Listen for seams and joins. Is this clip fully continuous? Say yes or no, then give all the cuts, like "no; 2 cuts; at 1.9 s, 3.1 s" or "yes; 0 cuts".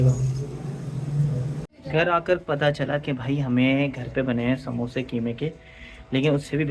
no; 1 cut; at 1.7 s